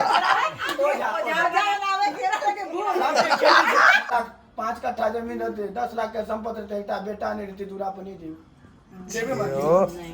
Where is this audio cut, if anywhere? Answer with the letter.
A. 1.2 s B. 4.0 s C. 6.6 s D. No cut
B